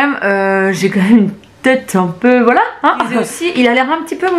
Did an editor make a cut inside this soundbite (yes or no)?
yes